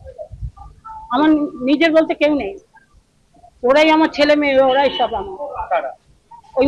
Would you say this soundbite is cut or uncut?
uncut